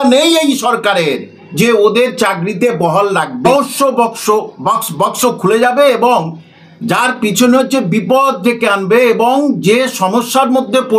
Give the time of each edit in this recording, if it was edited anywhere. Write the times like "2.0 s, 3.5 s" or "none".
3.5 s

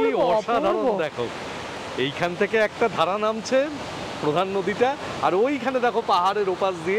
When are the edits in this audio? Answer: none

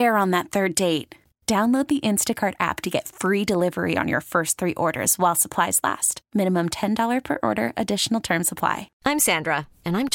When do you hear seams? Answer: 8.9 s

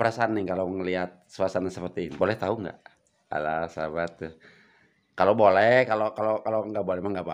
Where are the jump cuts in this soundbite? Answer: 2.1 s

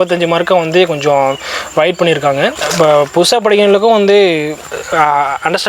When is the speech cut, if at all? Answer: none

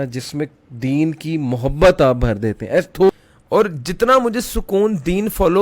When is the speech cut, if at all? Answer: 3.2 s

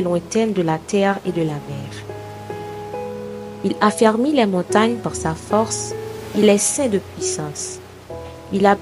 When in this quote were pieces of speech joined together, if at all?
1.7 s, 3.0 s

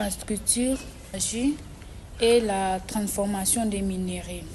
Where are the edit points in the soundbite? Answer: 1.2 s

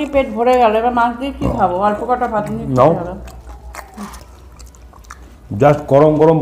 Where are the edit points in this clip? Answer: 4.2 s

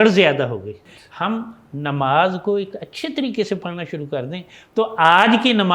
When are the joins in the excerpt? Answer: 1.0 s

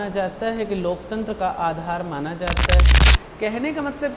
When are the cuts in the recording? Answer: 2.8 s

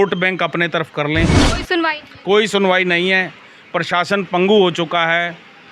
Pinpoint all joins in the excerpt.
1.5 s

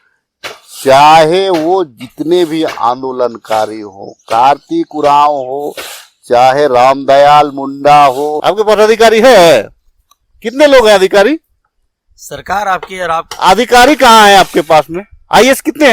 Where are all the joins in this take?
8.4 s

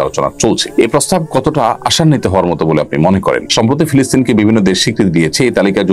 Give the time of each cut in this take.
3.5 s

